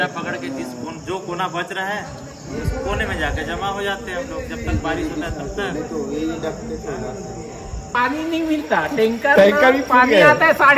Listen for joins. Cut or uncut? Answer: cut